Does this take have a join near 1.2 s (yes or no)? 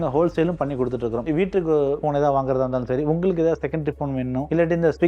yes